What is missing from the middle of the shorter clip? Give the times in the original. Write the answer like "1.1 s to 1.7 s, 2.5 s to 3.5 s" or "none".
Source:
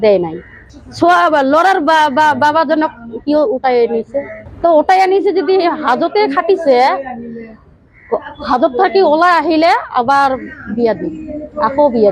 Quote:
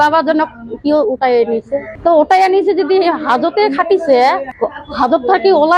4.3 s to 4.4 s, 7.1 s to 8.0 s